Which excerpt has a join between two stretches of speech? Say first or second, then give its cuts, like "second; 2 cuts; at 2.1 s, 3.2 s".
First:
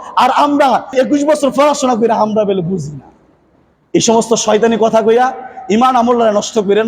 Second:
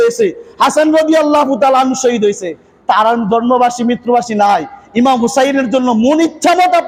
first; 1 cut; at 0.9 s